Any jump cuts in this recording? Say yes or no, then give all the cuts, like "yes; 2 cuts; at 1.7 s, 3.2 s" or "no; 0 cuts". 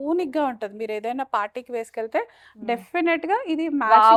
no; 0 cuts